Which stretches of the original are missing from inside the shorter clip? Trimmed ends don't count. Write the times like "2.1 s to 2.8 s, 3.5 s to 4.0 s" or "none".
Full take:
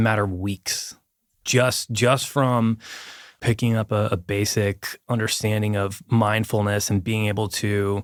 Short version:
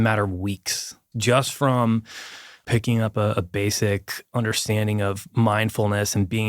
1.1 s to 1.9 s